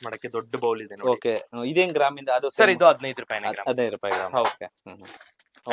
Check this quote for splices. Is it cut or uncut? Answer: uncut